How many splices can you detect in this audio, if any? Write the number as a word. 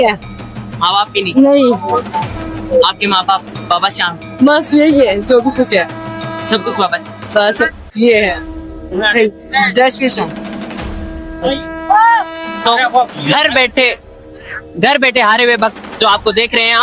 zero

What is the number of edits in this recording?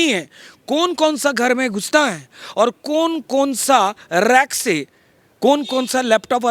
zero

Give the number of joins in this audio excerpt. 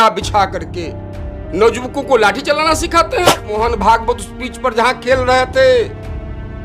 one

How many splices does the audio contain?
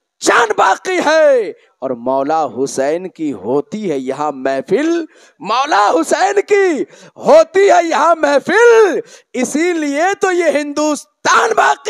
zero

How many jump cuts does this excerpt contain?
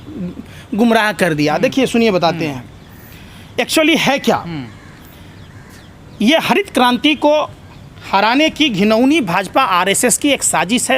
zero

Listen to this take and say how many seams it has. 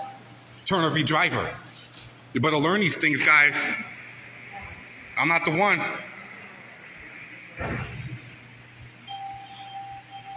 zero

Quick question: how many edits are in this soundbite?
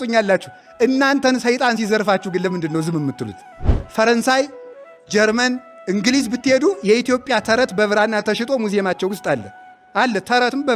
one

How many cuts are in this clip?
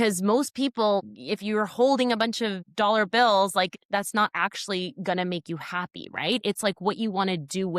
three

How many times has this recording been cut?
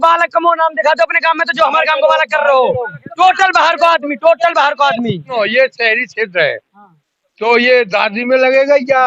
one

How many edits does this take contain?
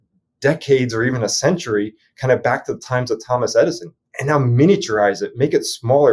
one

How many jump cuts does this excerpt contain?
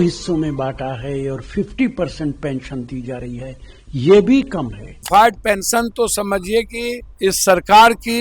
two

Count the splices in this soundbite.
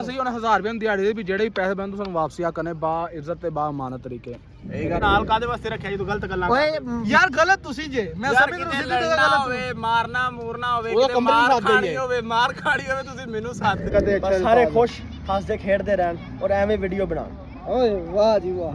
two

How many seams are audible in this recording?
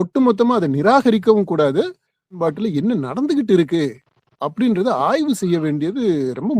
one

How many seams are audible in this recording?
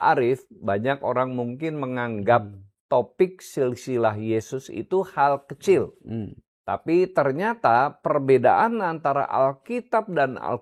zero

